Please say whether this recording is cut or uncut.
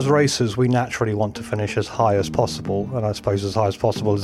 uncut